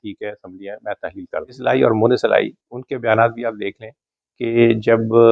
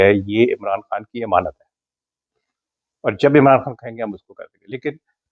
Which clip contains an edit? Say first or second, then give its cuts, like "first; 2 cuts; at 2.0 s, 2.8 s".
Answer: first; 1 cut; at 1.5 s